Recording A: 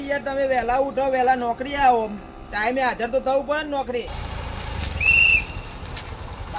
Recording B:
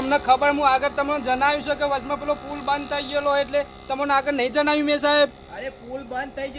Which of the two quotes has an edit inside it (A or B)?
A